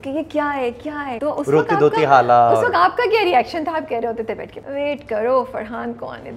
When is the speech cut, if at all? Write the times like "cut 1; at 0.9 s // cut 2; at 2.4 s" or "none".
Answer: cut 1; at 1.1 s // cut 2; at 4.5 s